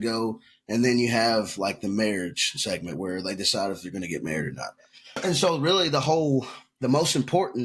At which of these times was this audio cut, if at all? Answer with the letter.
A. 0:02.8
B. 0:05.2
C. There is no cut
B